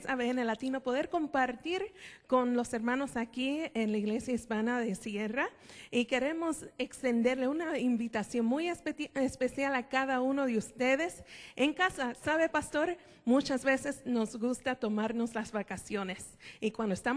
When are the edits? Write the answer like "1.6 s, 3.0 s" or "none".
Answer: 6.0 s